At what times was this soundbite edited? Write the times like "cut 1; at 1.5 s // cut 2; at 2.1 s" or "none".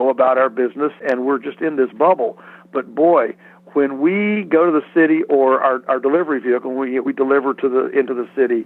cut 1; at 1.0 s